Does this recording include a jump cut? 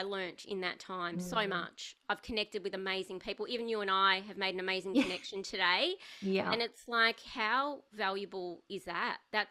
no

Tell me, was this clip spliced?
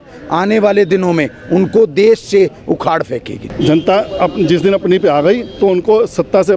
yes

